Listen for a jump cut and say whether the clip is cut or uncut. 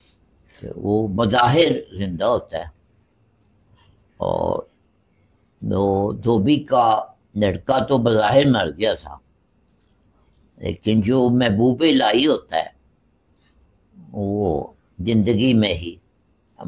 uncut